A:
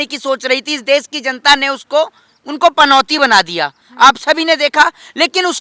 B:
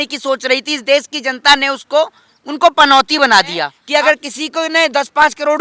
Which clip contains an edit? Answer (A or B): B